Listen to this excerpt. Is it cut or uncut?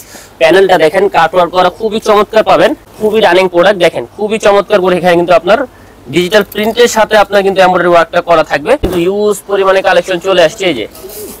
cut